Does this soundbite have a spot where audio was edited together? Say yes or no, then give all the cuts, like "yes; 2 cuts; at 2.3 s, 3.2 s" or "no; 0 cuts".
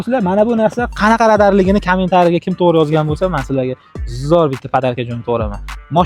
no; 0 cuts